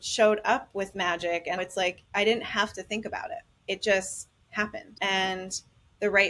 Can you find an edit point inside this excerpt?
yes; 3 cuts; at 1.6 s, 3.5 s, 4.8 s

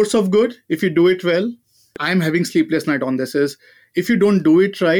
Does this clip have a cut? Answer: yes; 1 cut; at 2.0 s

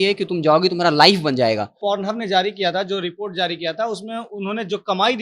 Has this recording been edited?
yes; 1 cut; at 1.8 s

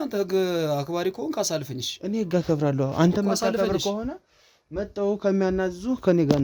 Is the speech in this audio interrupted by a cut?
no; 0 cuts

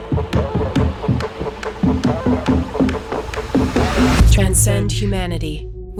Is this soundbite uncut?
yes; 0 cuts

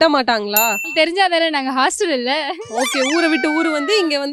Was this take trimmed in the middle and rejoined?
no; 0 cuts

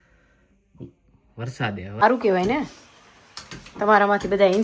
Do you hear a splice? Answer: yes; 1 cut; at 2.0 s

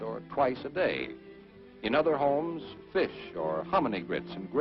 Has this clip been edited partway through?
no; 0 cuts

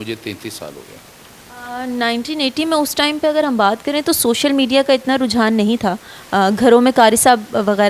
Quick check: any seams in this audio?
no; 0 cuts

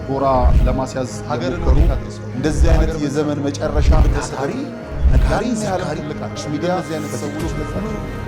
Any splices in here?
no; 0 cuts

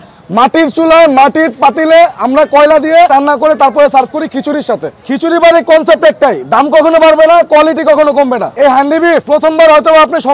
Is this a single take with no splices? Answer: no; 2 cuts; at 3.1 s, 8.5 s

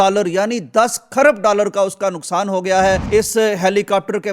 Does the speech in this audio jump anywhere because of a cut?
yes; 1 cut; at 3.0 s

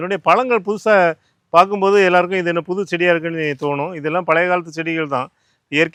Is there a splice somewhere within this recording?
no; 0 cuts

